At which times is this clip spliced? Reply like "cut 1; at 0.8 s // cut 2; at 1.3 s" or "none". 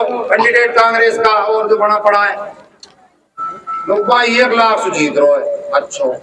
none